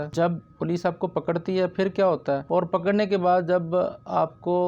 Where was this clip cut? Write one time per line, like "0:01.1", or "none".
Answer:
0:02.4